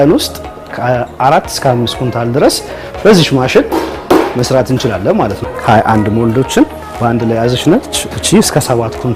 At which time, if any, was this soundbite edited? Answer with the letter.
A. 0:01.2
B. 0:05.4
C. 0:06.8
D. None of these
B